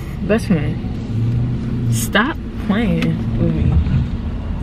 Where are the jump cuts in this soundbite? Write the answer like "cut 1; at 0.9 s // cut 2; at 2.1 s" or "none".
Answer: none